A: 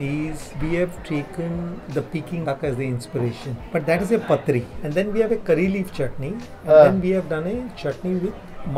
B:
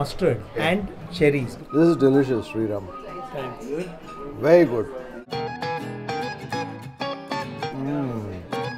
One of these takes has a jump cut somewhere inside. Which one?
B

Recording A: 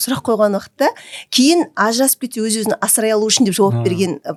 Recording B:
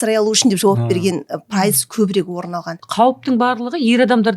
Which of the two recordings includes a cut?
B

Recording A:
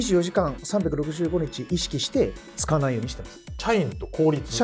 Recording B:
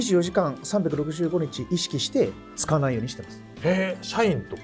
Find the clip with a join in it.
A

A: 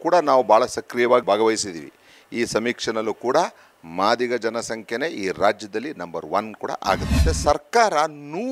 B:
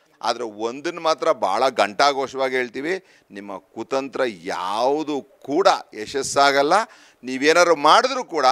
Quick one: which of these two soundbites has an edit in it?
A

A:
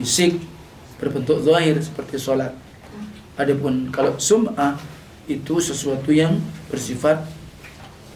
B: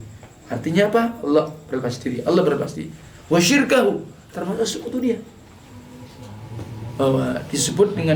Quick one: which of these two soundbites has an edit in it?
B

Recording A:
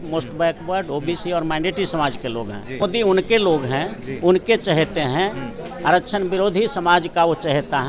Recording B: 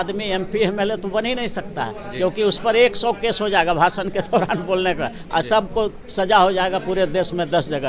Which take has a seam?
A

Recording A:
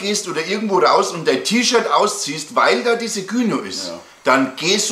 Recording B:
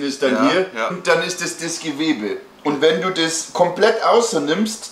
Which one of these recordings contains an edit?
B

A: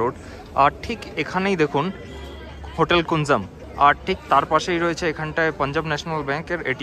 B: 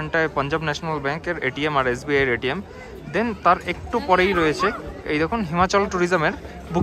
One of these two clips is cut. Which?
A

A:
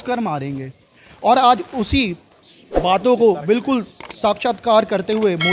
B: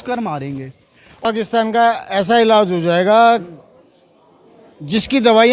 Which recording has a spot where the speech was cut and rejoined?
B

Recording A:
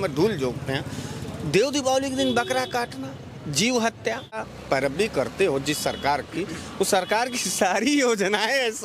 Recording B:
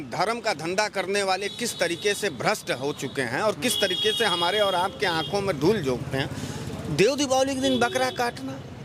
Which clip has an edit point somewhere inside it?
A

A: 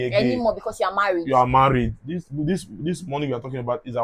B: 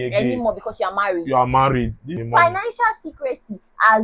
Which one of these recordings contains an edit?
B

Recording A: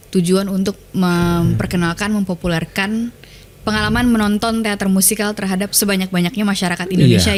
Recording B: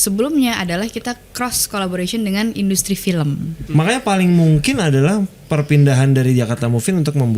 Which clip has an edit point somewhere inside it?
B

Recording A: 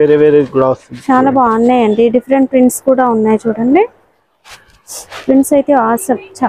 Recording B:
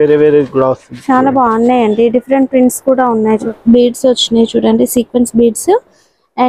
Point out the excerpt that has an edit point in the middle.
B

